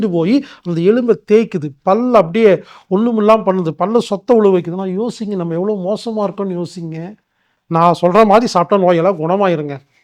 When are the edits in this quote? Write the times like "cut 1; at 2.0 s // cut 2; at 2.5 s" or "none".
cut 1; at 7.5 s